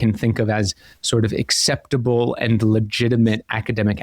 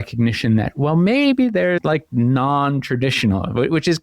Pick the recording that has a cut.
second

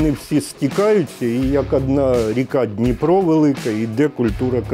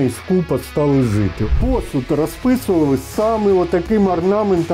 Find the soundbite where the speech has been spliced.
second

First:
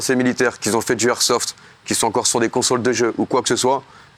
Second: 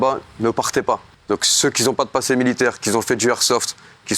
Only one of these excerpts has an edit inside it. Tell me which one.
second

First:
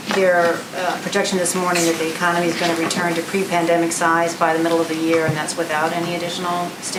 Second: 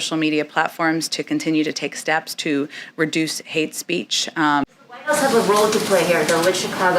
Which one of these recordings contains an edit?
second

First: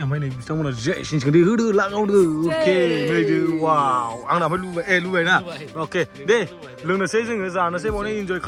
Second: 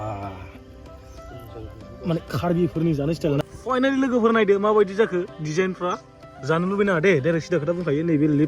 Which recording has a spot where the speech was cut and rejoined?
second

